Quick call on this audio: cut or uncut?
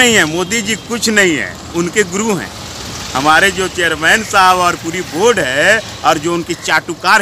uncut